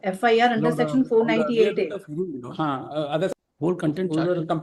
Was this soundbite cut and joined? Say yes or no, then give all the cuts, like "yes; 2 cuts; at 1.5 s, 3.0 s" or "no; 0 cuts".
yes; 1 cut; at 3.3 s